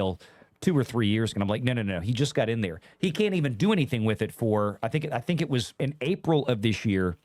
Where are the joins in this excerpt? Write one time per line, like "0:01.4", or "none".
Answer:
0:05.8